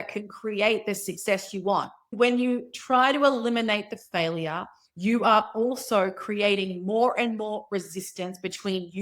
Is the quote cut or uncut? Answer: cut